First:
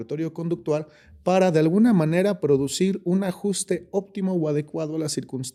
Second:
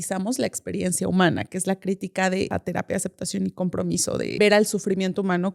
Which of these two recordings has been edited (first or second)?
second